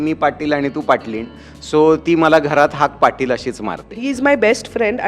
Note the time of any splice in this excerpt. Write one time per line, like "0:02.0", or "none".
0:03.9

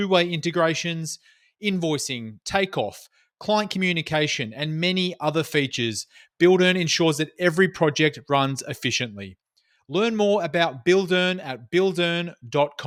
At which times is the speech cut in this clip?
none

